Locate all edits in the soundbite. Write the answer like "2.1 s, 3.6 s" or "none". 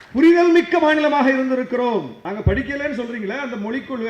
2.2 s